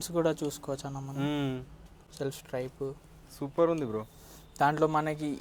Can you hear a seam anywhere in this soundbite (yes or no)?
no